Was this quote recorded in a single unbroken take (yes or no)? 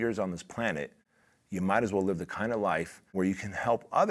no